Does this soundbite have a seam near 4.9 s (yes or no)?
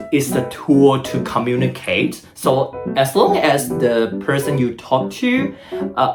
no